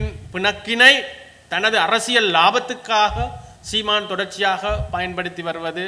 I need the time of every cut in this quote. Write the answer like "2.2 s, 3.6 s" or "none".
none